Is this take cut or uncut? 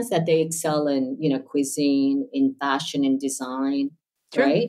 uncut